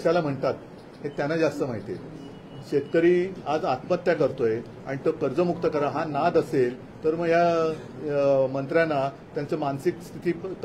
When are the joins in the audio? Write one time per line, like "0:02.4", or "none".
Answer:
none